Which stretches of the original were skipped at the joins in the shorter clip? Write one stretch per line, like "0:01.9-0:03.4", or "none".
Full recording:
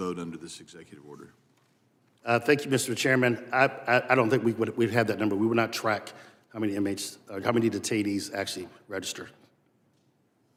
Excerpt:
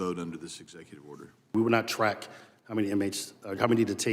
0:01.5-0:05.4